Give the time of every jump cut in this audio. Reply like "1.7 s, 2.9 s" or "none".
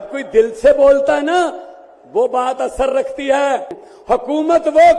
3.8 s